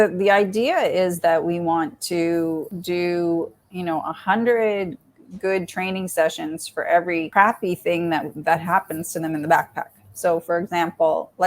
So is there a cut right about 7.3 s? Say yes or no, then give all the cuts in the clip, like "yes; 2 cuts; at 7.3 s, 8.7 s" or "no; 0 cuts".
yes; 2 cuts; at 2.7 s, 7.3 s